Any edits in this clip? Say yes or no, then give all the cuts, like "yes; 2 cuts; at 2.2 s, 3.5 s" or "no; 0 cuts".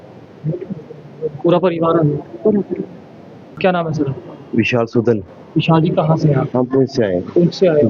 no; 0 cuts